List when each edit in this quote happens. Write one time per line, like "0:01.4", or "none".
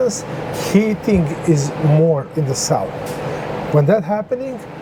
none